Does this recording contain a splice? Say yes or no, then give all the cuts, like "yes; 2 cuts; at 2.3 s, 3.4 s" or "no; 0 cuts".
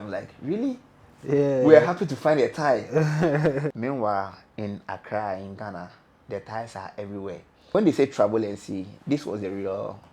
yes; 2 cuts; at 3.7 s, 7.7 s